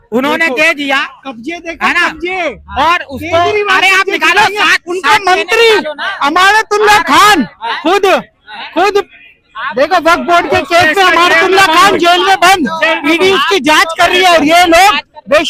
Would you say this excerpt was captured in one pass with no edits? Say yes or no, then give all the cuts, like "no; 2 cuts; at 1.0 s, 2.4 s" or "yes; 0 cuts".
yes; 0 cuts